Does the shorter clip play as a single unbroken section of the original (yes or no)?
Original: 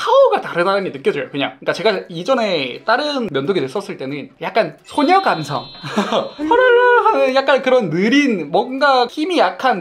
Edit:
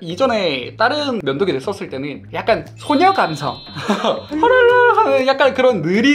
yes